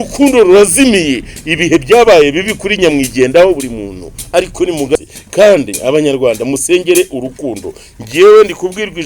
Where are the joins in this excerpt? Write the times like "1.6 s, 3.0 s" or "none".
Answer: 4.9 s